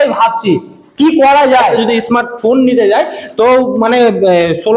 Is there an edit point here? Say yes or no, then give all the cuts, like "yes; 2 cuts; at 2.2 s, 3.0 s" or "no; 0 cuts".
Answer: yes; 1 cut; at 1.8 s